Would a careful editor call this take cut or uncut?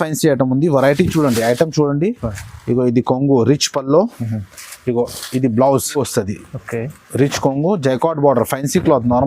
cut